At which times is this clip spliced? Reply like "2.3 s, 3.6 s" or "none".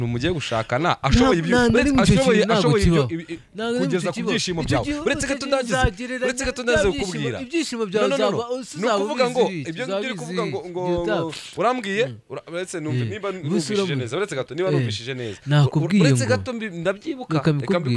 none